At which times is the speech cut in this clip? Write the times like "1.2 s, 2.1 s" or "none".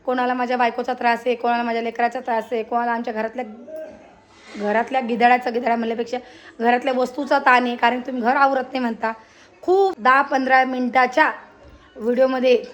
9.9 s